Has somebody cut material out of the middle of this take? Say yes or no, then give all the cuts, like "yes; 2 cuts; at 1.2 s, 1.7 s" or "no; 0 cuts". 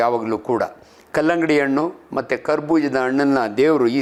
no; 0 cuts